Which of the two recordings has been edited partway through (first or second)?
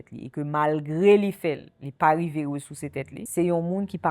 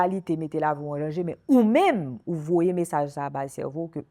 first